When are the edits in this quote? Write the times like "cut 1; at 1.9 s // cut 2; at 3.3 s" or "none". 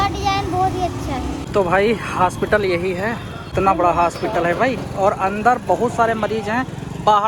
cut 1; at 1.4 s // cut 2; at 3.5 s